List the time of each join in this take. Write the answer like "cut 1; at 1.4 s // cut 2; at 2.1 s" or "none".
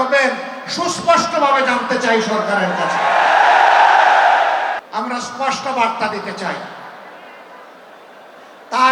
cut 1; at 4.8 s